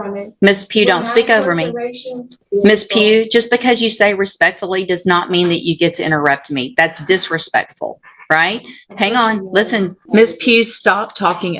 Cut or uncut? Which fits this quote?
cut